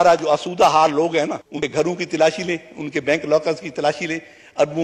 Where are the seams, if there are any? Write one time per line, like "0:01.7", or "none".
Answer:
0:01.6